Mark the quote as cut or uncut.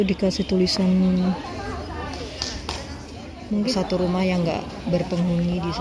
cut